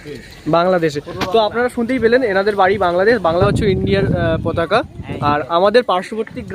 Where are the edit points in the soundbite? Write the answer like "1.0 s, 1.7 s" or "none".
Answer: 3.4 s